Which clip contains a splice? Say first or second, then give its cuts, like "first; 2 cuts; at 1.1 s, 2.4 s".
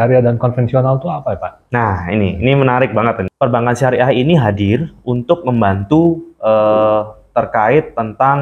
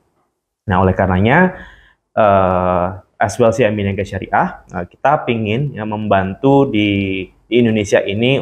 first; 1 cut; at 3.3 s